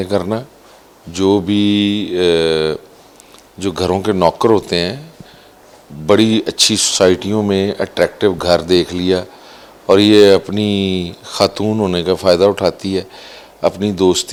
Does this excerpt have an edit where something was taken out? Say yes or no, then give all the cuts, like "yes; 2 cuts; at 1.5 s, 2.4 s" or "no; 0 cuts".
no; 0 cuts